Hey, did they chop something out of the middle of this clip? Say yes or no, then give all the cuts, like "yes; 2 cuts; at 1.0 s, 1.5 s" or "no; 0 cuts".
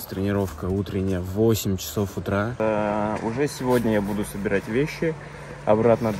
yes; 1 cut; at 2.6 s